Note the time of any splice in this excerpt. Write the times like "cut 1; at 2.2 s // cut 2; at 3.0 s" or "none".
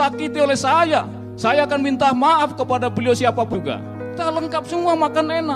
cut 1; at 4.2 s